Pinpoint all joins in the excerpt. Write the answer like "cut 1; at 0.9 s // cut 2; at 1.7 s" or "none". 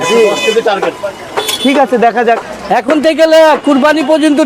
cut 1; at 2.5 s